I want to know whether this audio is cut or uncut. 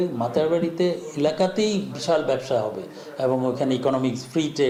uncut